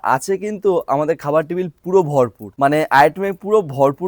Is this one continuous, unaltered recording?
no; 1 cut; at 2.5 s

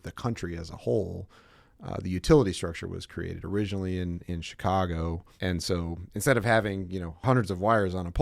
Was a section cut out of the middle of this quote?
yes; 2 cuts; at 5.3 s, 7.1 s

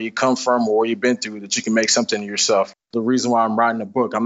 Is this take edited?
yes; 1 cut; at 2.9 s

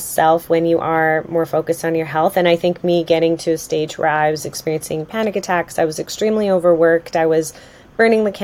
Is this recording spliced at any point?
no; 0 cuts

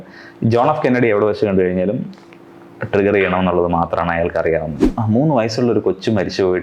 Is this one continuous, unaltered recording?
no; 1 cut; at 4.8 s

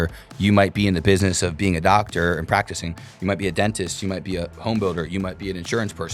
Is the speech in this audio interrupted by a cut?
no; 0 cuts

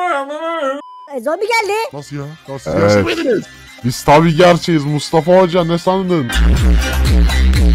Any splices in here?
no; 0 cuts

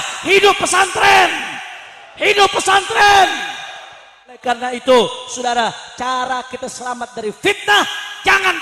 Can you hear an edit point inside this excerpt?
yes; 1 cut; at 4.4 s

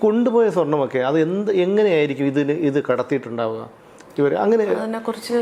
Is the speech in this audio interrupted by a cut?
no; 0 cuts

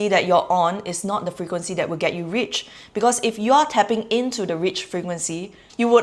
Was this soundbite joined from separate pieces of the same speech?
no; 0 cuts

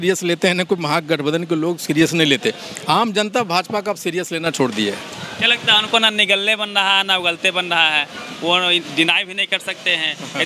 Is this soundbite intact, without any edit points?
yes; 0 cuts

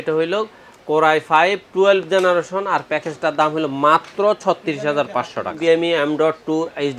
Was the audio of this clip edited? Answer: yes; 1 cut; at 5.6 s

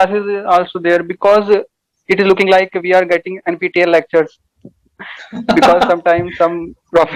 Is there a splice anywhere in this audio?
no; 0 cuts

